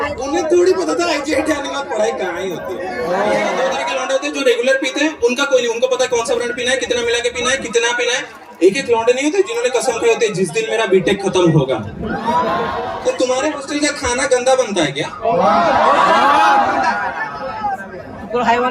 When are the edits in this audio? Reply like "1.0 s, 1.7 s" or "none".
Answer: 3.8 s, 12.8 s